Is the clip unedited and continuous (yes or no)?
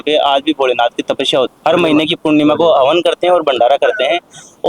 no